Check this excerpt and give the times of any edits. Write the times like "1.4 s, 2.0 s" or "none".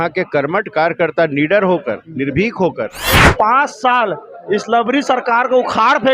3.3 s